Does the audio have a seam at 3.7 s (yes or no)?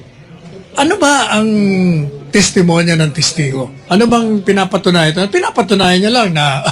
yes